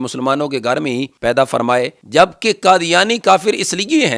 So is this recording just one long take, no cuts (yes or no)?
no